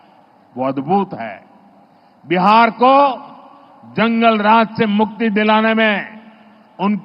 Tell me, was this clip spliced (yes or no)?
no